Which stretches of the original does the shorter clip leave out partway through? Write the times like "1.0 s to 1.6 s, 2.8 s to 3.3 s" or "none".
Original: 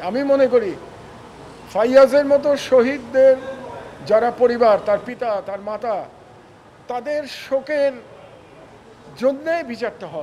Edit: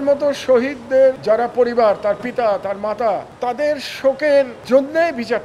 3.4 s to 4.0 s, 6.1 s to 6.8 s, 8.0 s to 9.1 s